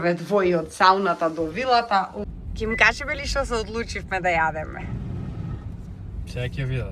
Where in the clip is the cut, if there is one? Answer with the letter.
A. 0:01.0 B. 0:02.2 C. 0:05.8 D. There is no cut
B